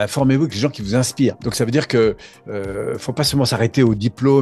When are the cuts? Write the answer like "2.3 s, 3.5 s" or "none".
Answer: none